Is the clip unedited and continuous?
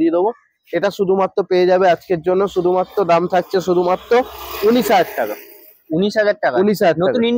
yes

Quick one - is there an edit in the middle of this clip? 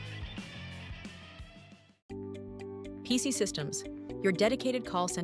yes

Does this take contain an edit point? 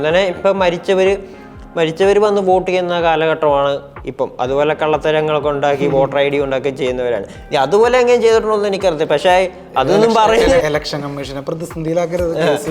yes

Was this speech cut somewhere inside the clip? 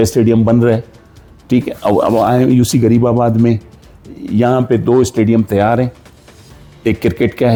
no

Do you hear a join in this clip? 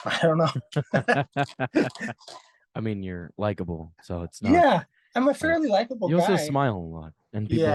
no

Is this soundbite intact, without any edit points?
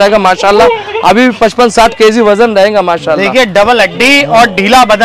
yes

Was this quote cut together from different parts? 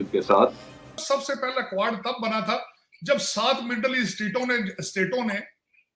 yes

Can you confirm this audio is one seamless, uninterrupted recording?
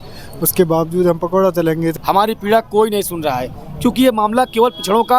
no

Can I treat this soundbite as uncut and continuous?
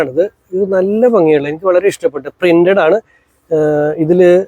yes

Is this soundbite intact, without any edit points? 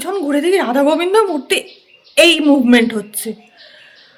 yes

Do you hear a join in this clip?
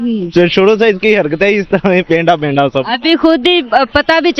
no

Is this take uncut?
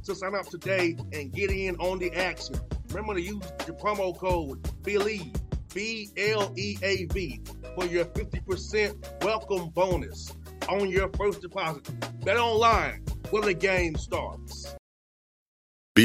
no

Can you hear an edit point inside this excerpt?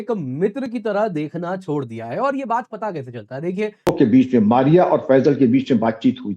yes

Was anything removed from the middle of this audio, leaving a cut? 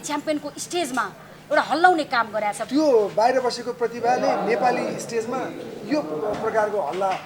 yes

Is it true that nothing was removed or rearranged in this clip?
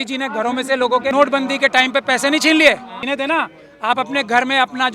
no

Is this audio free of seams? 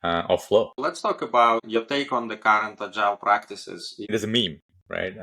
no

